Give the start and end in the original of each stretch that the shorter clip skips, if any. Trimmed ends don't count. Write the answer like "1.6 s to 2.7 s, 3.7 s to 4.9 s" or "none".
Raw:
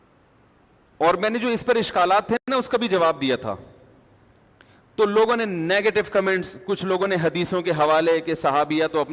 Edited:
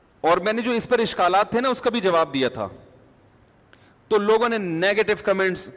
2.4 s to 2.5 s